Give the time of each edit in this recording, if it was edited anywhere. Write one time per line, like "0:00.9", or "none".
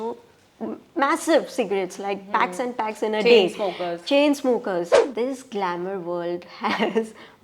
0:05.0